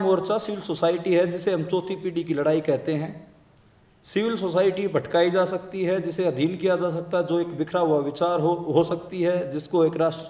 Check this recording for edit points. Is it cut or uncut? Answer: uncut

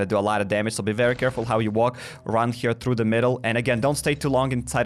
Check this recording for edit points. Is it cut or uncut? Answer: uncut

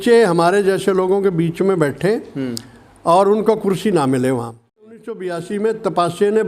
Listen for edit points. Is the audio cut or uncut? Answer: cut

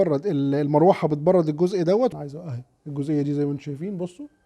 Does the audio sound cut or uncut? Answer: cut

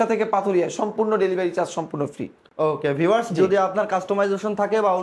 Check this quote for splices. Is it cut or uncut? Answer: uncut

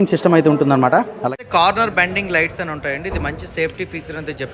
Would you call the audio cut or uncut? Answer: cut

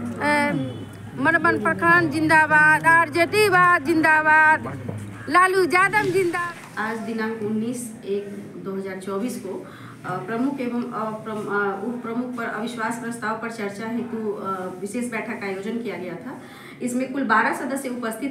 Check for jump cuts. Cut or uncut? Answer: cut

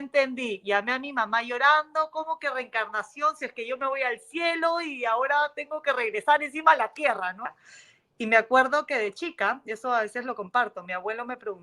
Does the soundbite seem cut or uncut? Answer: cut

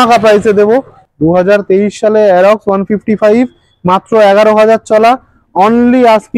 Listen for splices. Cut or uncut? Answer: cut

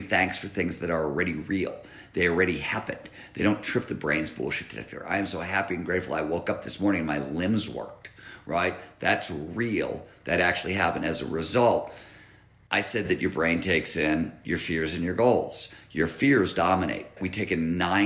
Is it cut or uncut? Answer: uncut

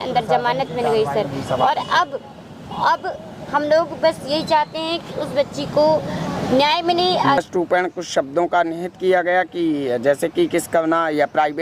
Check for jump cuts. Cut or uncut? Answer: cut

